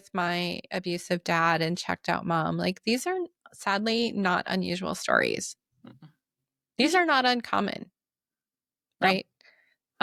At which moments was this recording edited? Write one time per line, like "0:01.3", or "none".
none